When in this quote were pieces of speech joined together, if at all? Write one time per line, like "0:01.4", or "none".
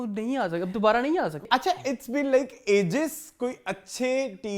0:01.4